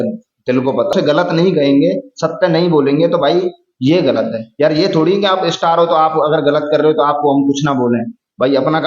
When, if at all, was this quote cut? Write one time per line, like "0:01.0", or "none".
0:00.9